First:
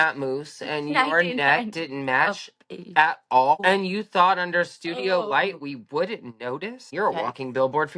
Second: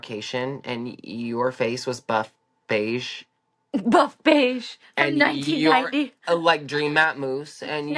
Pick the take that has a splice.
first; 2 cuts; at 3.6 s, 6.9 s

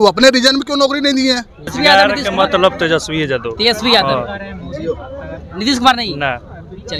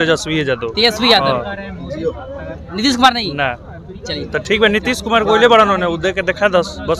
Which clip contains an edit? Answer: first; 1 cut; at 1.7 s

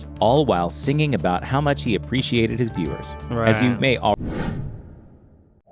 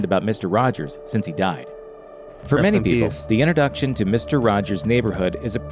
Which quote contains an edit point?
first; 1 cut; at 4.2 s

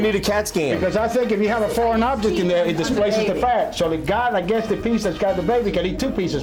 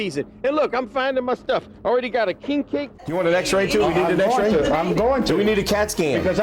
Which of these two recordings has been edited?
second; 1 cut; at 3.1 s

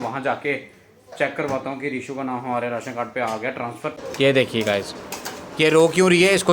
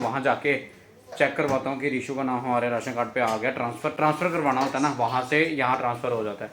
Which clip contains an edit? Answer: first; 1 cut; at 3.9 s

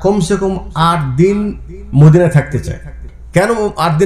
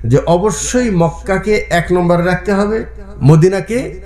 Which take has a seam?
first; 1 cut; at 3.0 s

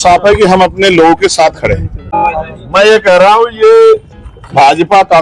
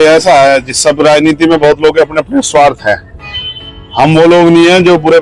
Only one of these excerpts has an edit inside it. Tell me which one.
first; 1 cut; at 2.2 s

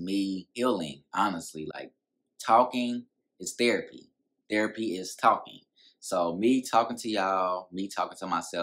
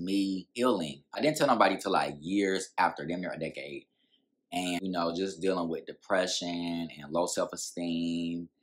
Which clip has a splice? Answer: second; 2 cuts; at 1.2 s, 4.8 s

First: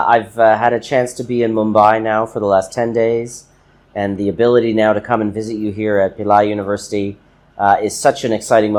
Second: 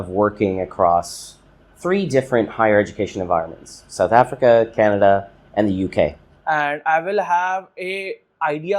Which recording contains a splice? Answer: second; 1 cut; at 6.3 s

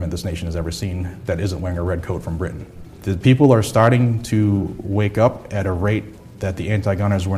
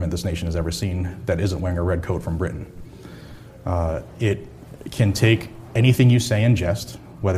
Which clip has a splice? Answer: first; 1 cut; at 3.0 s

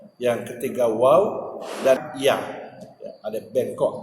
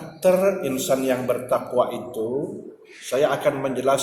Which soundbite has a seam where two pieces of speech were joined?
first; 1 cut; at 2.0 s

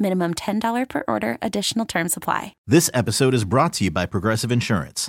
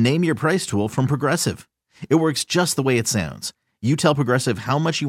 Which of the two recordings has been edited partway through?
first; 1 cut; at 2.5 s

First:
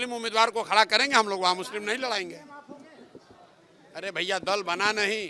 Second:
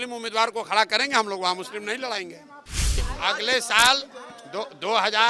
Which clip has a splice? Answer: second; 1 cut; at 3.0 s

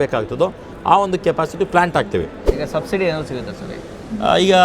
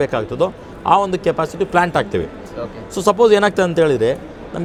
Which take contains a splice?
first; 1 cut; at 2.4 s

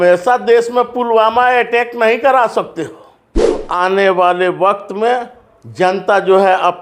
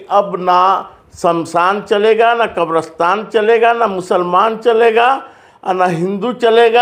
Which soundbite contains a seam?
first; 1 cut; at 3.6 s

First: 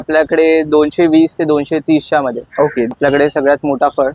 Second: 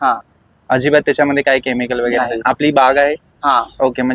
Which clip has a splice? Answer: first; 1 cut; at 2.9 s

